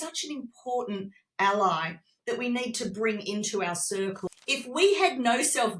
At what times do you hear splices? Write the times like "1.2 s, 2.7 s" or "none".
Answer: 4.2 s